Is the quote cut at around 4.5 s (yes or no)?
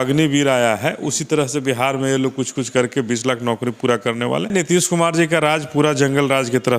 yes